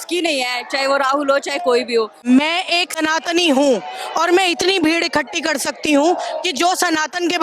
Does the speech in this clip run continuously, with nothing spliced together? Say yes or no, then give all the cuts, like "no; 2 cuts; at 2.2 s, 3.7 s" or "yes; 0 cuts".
no; 1 cut; at 2.1 s